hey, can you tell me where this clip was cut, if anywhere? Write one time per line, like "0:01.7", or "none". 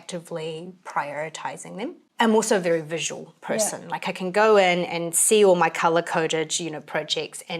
0:02.0

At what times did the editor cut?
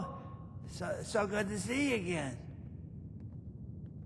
0:02.4

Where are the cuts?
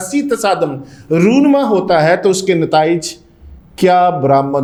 none

